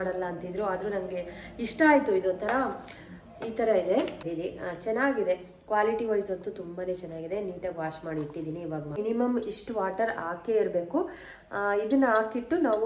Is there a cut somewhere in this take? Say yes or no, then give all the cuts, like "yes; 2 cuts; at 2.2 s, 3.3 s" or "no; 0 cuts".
yes; 2 cuts; at 4.3 s, 9.0 s